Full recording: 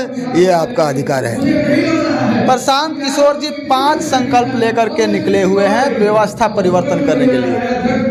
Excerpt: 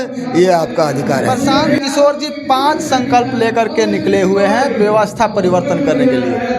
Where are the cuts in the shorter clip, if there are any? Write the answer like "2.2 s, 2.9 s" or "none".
1.8 s